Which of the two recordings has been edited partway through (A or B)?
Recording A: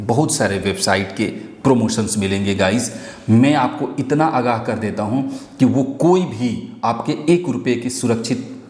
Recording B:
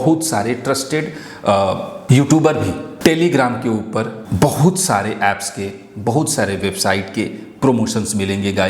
B